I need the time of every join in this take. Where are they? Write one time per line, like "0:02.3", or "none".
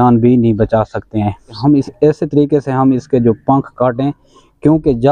0:01.6